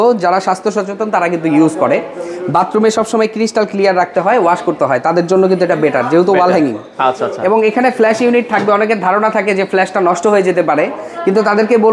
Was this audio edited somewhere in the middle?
no; 0 cuts

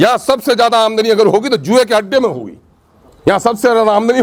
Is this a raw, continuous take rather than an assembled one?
yes; 0 cuts

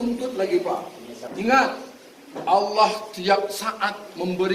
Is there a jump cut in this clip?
yes; 1 cut; at 1.3 s

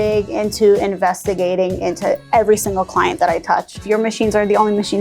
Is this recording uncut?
no; 1 cut; at 3.8 s

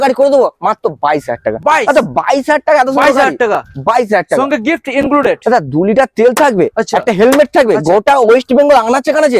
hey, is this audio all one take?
yes; 0 cuts

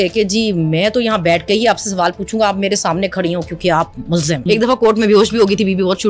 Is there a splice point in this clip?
yes; 1 cut; at 4.4 s

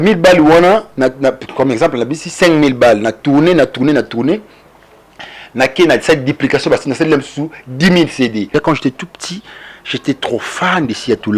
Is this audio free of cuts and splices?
no; 1 cut; at 8.5 s

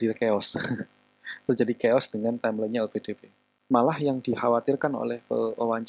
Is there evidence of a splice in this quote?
yes; 1 cut; at 3.6 s

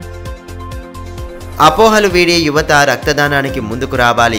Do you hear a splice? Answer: yes; 1 cut; at 1.0 s

